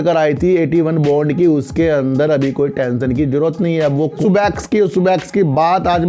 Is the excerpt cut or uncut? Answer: cut